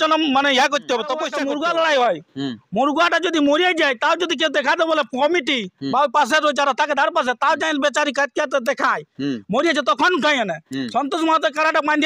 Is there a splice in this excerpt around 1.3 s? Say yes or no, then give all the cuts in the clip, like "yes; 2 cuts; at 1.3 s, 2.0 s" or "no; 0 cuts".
yes; 1 cut; at 1.3 s